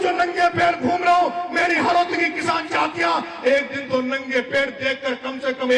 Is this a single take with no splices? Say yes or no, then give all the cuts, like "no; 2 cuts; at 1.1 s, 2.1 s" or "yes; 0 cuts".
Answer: yes; 0 cuts